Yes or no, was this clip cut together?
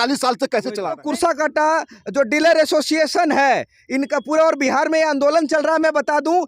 yes